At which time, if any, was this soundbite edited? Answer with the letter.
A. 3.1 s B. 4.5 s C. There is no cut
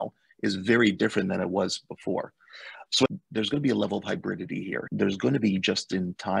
A